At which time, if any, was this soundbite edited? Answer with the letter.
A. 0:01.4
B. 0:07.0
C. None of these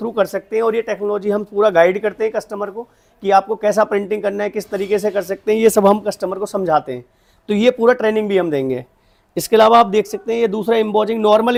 C